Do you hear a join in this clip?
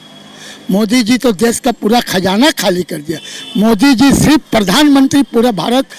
no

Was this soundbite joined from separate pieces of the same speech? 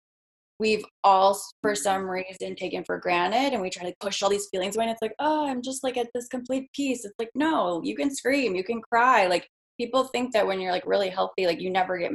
no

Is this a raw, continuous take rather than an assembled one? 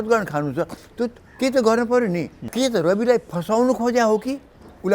no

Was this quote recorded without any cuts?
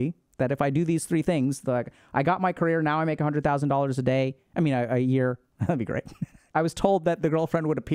no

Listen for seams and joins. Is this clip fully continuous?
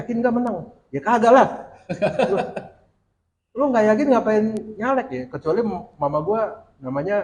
yes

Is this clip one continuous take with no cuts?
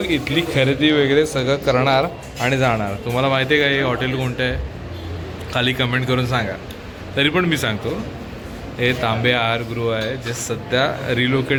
yes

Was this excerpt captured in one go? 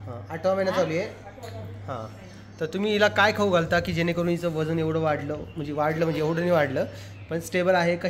yes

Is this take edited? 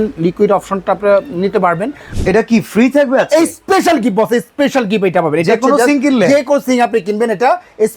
yes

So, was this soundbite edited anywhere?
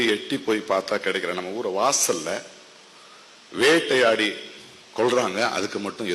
no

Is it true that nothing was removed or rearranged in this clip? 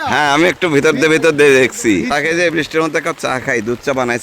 no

